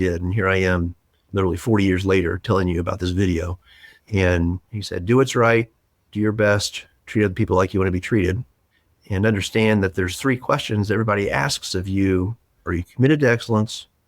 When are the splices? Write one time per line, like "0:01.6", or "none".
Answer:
0:12.6